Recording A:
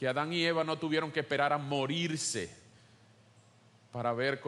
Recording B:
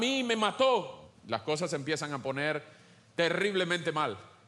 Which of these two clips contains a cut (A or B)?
B